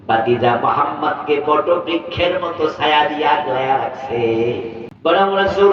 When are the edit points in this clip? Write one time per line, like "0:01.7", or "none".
0:04.8